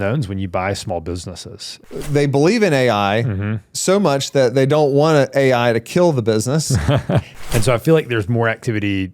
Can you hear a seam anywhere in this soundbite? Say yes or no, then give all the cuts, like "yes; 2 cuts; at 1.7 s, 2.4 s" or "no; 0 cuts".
yes; 2 cuts; at 1.7 s, 7.3 s